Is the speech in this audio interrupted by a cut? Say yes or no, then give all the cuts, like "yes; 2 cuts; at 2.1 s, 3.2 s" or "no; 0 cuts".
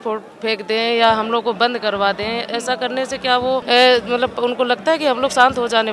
yes; 1 cut; at 3.6 s